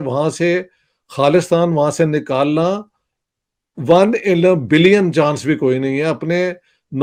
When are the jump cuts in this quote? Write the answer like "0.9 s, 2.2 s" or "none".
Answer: none